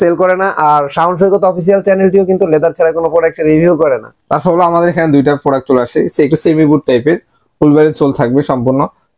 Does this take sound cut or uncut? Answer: uncut